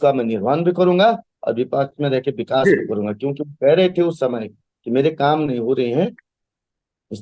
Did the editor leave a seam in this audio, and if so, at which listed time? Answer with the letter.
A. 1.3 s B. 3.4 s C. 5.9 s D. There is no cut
D